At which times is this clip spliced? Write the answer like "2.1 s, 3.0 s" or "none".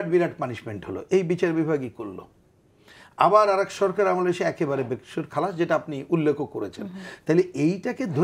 none

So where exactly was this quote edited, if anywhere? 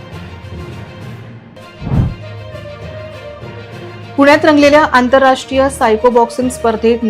1.0 s

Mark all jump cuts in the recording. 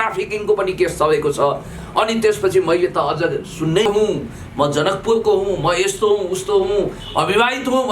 3.8 s

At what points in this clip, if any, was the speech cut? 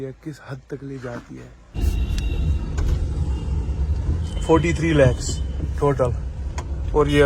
1.7 s

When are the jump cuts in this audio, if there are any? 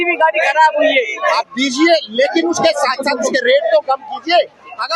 1.2 s

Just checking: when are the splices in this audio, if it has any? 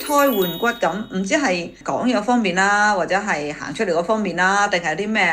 none

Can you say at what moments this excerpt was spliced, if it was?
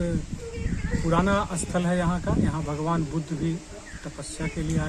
none

